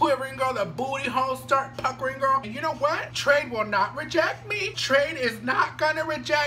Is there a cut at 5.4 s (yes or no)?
no